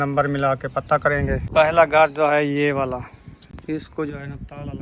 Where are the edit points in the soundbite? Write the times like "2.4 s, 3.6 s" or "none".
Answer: 1.4 s